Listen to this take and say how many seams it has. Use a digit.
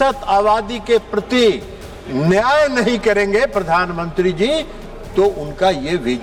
0